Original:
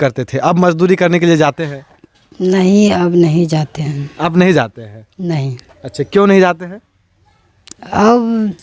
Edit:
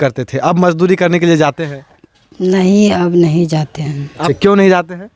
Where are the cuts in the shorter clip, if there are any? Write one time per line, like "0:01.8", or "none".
0:04.3